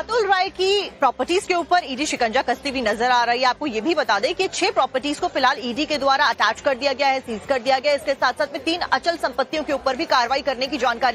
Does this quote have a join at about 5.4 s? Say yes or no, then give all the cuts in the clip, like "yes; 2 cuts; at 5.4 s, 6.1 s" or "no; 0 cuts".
yes; 1 cut; at 5.4 s